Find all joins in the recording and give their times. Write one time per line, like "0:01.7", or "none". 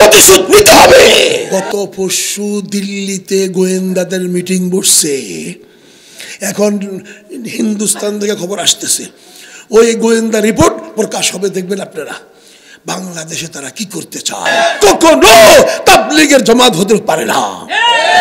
0:01.5
0:14.5